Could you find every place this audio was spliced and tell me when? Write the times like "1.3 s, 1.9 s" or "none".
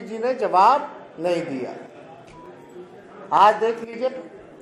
none